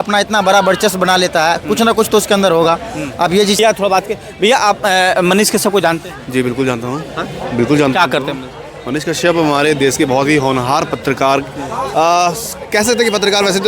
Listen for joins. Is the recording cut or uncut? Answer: cut